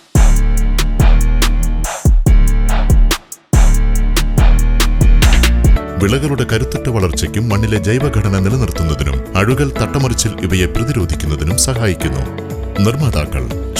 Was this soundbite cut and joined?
yes; 1 cut; at 5.8 s

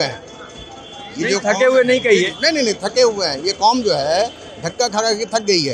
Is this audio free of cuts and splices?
yes; 0 cuts

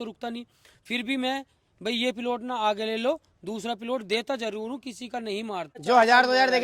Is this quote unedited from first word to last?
no; 1 cut; at 5.7 s

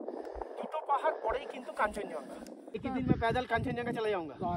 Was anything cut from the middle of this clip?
yes; 1 cut; at 2.8 s

